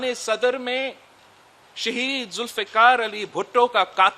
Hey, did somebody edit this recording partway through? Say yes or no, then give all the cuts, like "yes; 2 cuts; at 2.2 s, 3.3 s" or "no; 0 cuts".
no; 0 cuts